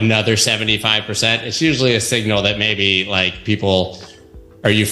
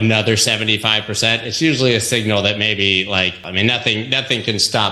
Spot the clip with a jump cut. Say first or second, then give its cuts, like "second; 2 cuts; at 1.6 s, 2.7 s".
second; 1 cut; at 3.4 s